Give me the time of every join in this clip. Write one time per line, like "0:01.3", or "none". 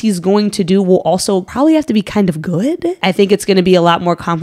0:01.5
0:03.0